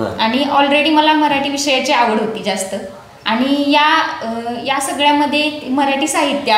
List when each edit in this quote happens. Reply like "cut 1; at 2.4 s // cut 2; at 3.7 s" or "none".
none